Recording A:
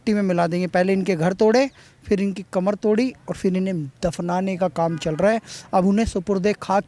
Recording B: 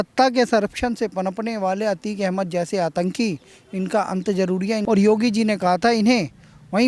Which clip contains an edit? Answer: B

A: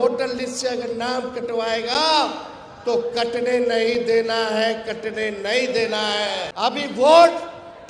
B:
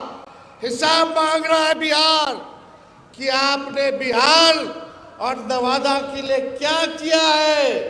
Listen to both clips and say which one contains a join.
A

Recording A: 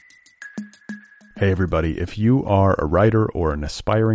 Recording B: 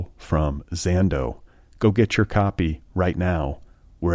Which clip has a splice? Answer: A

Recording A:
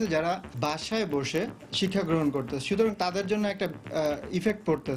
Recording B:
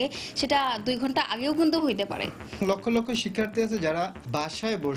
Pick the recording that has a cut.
B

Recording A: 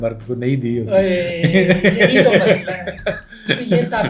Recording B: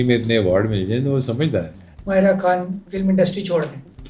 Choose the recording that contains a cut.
B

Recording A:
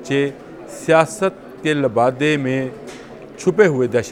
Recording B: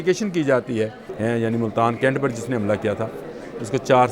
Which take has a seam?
B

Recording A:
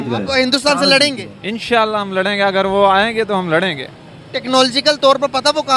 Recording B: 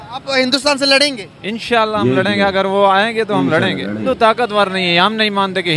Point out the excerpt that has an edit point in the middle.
B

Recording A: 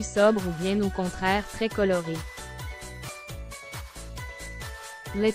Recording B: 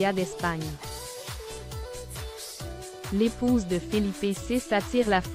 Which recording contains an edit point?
B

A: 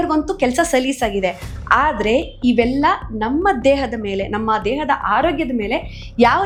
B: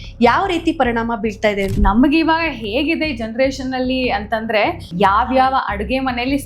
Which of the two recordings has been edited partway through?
B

